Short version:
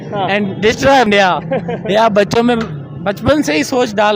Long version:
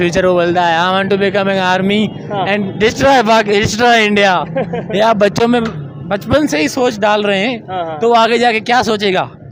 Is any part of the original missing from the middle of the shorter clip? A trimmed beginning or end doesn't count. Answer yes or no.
yes